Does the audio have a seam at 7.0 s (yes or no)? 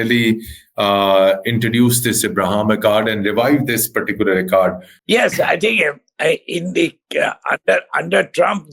no